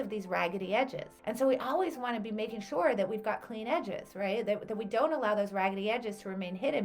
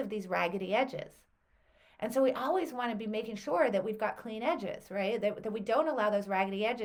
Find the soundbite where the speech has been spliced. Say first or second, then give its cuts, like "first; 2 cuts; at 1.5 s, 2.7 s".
first; 1 cut; at 1.1 s